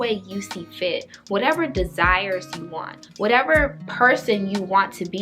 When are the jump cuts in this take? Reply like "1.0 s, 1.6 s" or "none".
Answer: 3.8 s